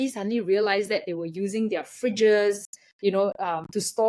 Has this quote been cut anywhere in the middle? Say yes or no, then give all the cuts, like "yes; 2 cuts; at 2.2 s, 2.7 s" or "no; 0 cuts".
no; 0 cuts